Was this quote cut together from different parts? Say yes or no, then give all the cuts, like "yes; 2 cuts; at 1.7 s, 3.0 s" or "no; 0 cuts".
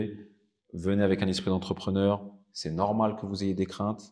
no; 0 cuts